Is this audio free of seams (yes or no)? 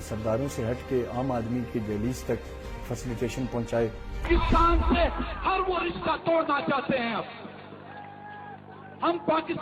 no